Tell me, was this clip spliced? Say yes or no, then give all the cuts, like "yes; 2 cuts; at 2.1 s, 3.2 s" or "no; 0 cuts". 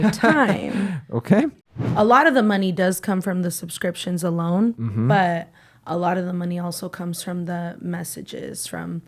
yes; 2 cuts; at 1.6 s, 5.0 s